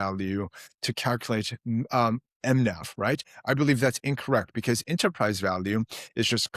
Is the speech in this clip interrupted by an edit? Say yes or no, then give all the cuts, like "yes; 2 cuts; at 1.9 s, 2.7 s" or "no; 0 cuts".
no; 0 cuts